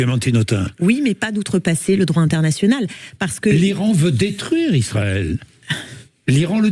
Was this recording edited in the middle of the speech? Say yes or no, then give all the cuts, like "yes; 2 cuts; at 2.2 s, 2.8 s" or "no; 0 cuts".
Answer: no; 0 cuts